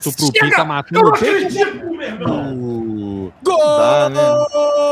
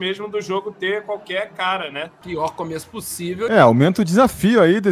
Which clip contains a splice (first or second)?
second